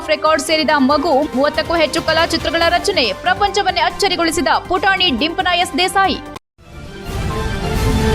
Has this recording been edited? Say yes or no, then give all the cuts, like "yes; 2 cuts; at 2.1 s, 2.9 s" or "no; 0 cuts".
yes; 1 cut; at 6.3 s